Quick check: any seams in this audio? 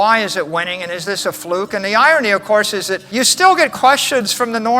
yes; 1 cut; at 3.0 s

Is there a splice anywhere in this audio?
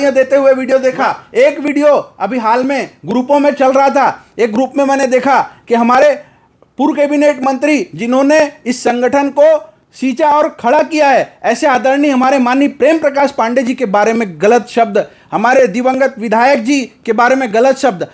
no; 0 cuts

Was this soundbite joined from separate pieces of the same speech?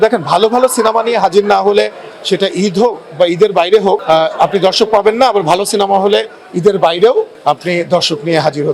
yes; 2 cuts; at 4.0 s, 7.3 s

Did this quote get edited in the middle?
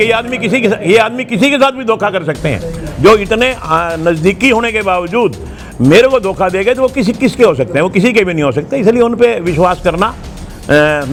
no; 0 cuts

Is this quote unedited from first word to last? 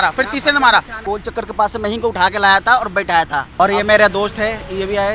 no; 2 cuts; at 1.0 s, 3.5 s

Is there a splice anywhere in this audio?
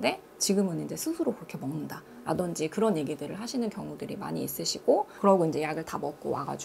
no; 0 cuts

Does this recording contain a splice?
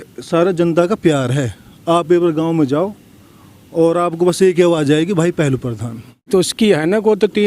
yes; 1 cut; at 6.3 s

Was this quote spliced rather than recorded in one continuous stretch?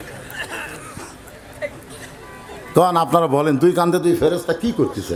no; 0 cuts

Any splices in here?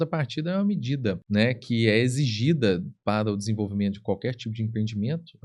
yes; 1 cut; at 1.2 s

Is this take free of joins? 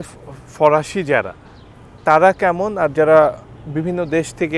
yes; 0 cuts

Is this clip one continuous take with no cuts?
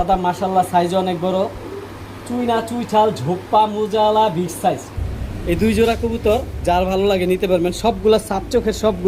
no; 1 cut; at 4.9 s

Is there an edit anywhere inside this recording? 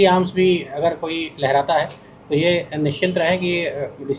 no; 0 cuts

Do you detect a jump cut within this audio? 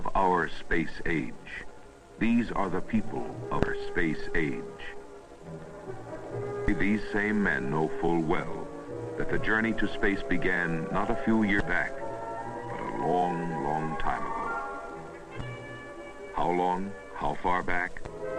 no; 0 cuts

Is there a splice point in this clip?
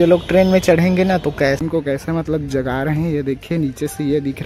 yes; 1 cut; at 1.6 s

